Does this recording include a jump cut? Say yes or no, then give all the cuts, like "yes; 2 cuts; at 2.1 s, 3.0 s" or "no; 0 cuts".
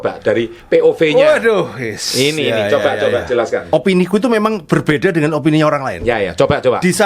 yes; 1 cut; at 3.6 s